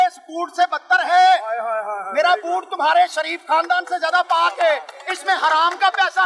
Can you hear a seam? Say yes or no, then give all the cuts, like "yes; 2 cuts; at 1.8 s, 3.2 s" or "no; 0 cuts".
no; 0 cuts